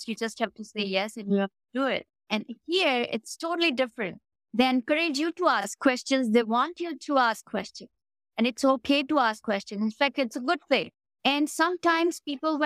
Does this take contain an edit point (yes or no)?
yes